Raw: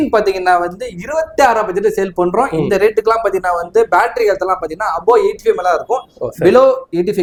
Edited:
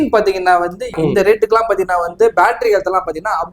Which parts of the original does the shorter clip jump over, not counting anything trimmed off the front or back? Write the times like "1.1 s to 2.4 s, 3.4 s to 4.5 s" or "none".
1.0 s to 2.5 s